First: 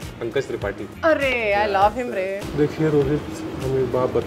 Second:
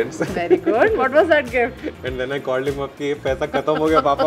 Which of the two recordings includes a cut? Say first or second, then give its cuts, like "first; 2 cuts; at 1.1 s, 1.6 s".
first; 1 cut; at 2.4 s